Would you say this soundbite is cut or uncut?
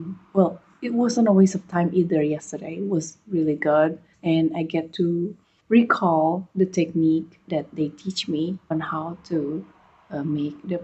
uncut